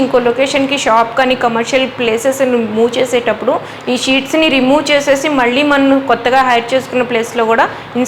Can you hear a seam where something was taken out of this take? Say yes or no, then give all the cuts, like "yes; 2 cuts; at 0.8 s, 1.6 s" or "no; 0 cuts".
no; 0 cuts